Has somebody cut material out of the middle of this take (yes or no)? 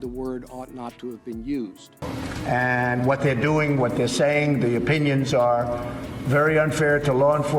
yes